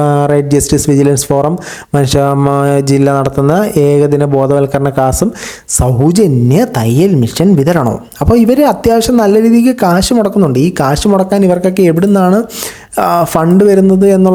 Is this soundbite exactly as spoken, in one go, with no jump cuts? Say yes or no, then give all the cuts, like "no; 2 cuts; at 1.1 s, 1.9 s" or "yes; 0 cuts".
yes; 0 cuts